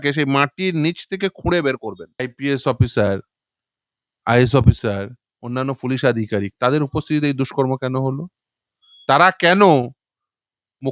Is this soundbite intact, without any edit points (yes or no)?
no